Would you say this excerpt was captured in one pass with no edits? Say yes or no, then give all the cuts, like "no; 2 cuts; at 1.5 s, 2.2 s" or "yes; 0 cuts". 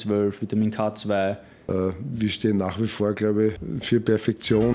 no; 2 cuts; at 1.5 s, 3.7 s